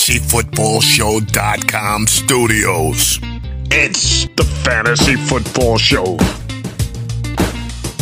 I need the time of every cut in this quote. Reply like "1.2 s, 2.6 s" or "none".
none